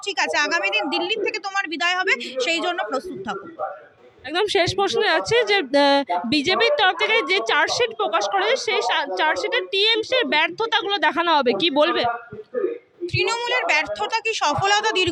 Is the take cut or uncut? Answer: uncut